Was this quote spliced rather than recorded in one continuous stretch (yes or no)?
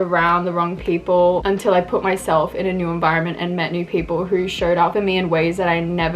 yes